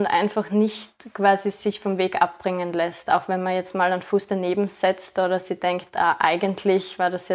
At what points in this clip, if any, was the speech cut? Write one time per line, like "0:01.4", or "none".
none